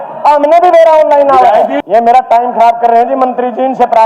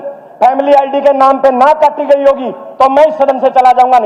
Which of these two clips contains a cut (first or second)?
first